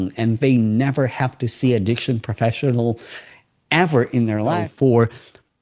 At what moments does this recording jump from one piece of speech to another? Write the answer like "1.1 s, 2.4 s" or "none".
4.7 s